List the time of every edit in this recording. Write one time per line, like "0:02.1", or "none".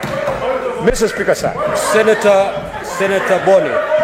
none